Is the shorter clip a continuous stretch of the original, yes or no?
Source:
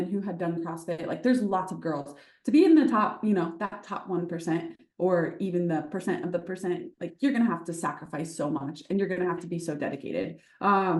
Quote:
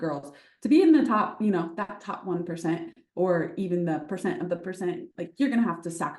yes